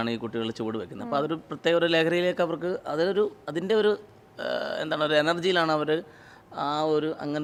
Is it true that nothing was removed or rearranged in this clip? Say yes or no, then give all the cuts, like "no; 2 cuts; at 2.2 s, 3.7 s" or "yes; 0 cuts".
yes; 0 cuts